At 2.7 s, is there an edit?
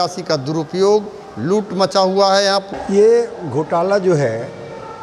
yes; 1 cut; at 2.7 s

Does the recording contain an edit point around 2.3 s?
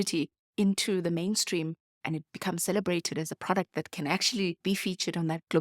yes; 2 cuts; at 2.3 s, 4.8 s

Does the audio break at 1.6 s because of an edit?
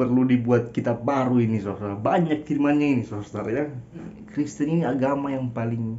no; 1 cut; at 4.2 s

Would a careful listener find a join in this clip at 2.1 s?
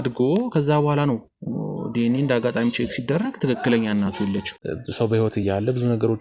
no; 1 cut; at 4.2 s

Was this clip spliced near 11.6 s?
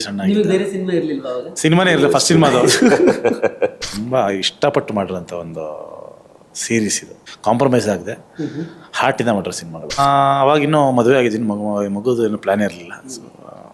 no; 2 cuts; at 3.9 s, 10.0 s

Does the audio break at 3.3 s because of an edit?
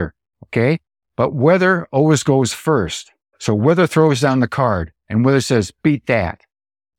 yes; 2 cuts; at 3.3 s, 4.9 s

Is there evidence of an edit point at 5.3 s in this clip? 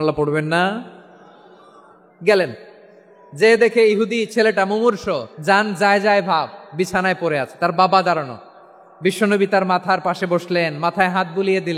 yes; 1 cut; at 5.3 s

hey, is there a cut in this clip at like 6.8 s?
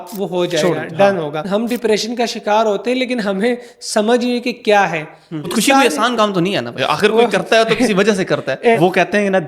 yes; 4 cuts; at 1.4 s, 5.5 s, 6.8 s, 8.8 s

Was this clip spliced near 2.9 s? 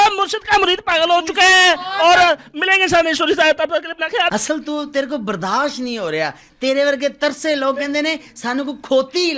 no; 1 cut; at 4.3 s

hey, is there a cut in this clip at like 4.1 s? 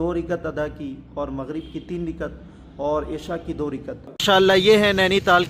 yes; 1 cut; at 4.1 s

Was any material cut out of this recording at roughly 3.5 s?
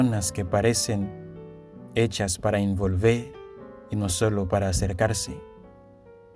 no; 1 cut; at 5.3 s

